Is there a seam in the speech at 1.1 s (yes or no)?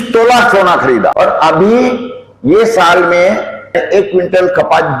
yes